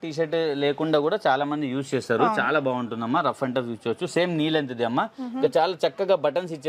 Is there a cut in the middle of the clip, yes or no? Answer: no